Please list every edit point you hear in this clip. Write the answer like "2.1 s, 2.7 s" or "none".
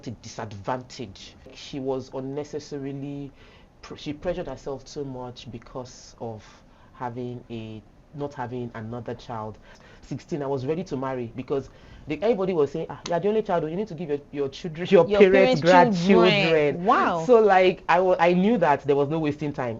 1.6 s, 9.8 s